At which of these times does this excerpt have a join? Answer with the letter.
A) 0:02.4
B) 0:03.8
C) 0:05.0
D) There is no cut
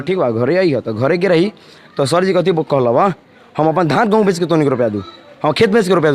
D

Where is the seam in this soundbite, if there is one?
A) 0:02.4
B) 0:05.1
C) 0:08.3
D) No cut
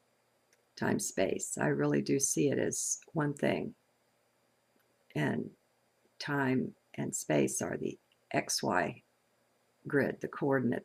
B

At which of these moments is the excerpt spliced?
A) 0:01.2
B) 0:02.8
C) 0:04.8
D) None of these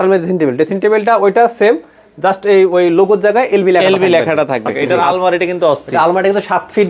C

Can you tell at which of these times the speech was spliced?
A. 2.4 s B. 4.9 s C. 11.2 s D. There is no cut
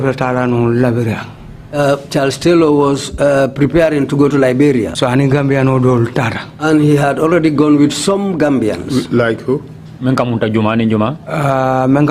B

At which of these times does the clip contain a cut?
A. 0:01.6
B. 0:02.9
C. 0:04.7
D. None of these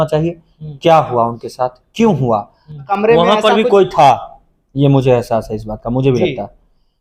B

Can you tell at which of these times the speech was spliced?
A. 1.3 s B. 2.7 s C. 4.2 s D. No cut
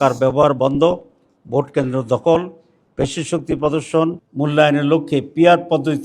C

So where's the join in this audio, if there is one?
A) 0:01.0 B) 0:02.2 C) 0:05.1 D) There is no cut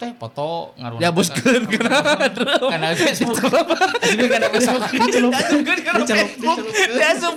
D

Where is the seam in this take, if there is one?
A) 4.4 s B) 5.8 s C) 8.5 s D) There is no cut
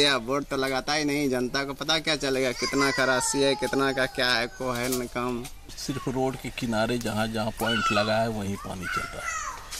B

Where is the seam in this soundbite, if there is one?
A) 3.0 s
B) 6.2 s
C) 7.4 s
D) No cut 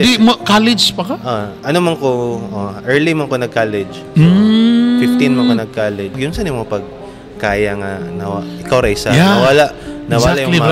B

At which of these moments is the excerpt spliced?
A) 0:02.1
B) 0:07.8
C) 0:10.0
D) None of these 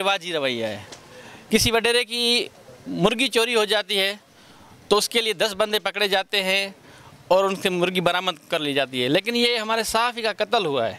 D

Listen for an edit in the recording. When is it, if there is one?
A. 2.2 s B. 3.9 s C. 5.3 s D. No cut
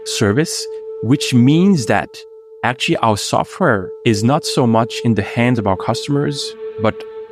B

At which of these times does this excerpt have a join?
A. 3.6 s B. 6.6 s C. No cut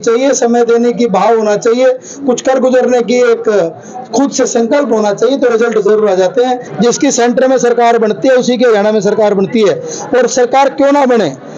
B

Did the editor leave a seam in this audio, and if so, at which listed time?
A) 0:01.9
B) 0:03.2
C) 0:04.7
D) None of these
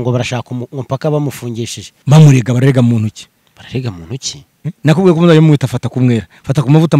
A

